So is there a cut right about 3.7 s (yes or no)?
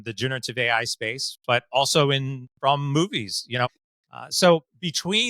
yes